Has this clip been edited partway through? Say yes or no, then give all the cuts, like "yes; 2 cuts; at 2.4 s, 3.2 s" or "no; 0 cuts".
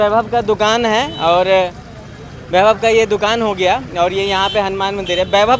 no; 0 cuts